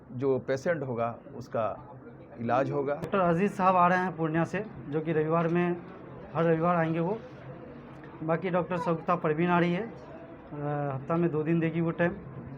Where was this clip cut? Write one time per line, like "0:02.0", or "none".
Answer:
0:03.1